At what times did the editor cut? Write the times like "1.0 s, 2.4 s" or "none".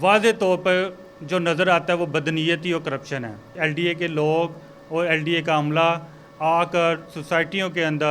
3.4 s